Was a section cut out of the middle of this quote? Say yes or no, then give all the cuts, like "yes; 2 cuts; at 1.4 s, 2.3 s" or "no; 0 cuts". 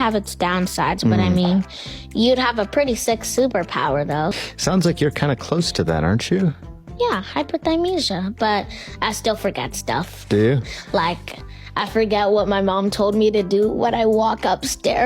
yes; 1 cut; at 4.3 s